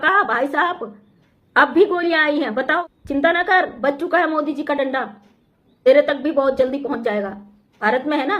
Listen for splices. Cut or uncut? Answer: cut